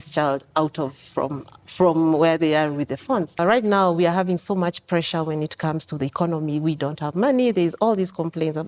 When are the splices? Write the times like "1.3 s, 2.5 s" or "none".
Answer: 3.4 s